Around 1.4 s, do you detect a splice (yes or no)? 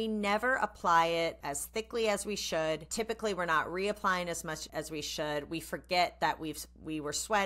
yes